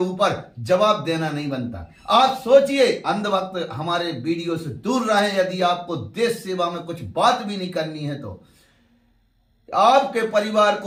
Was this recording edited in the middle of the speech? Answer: no; 0 cuts

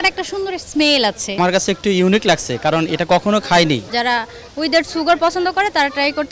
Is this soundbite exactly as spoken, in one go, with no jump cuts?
no; 2 cuts; at 1.4 s, 3.9 s

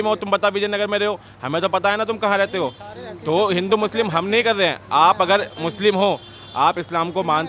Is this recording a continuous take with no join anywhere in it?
yes; 0 cuts

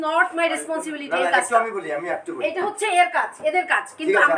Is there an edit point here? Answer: no; 0 cuts

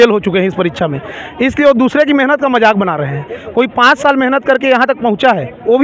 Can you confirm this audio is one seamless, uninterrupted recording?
yes; 0 cuts

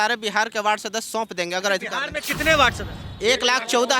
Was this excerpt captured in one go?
yes; 0 cuts

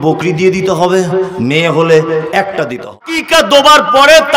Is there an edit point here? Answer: yes; 1 cut; at 3.1 s

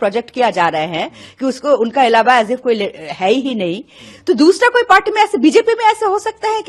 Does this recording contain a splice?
no; 0 cuts

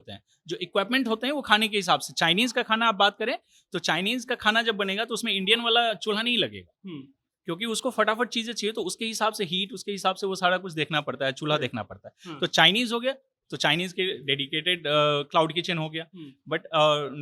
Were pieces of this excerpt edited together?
no; 0 cuts

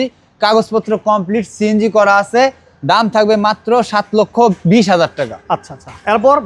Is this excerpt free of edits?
yes; 0 cuts

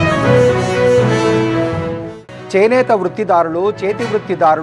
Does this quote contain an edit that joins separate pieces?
yes; 1 cut; at 2.0 s

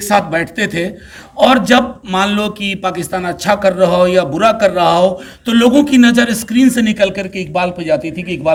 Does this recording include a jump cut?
no; 0 cuts

